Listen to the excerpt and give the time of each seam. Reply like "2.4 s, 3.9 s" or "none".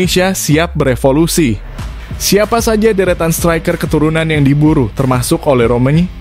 none